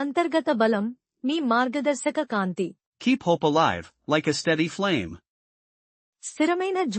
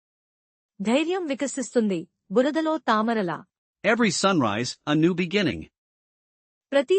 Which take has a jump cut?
first; 1 cut; at 2.8 s

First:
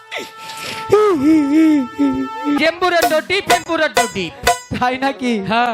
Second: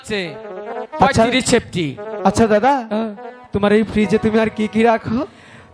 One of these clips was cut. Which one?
first; 1 cut; at 2.6 s

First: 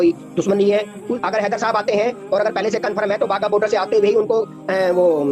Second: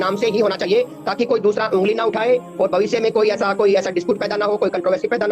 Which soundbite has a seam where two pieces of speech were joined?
first; 1 cut; at 1.0 s

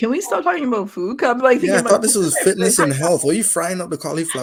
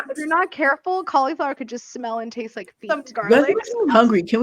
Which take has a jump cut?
second; 1 cut; at 2.8 s

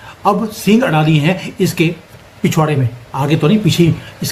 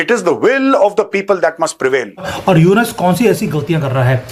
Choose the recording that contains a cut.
second; 1 cut; at 2.3 s

